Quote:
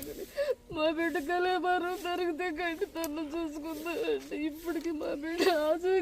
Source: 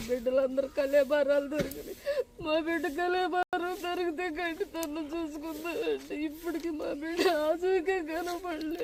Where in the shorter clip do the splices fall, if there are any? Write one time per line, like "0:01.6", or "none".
0:01.7